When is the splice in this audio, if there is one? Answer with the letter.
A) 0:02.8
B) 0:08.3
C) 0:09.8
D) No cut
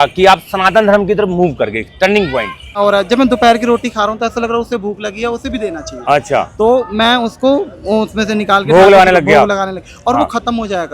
A